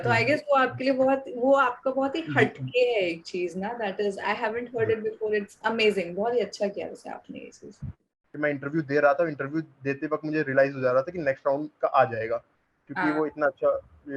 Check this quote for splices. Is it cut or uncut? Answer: cut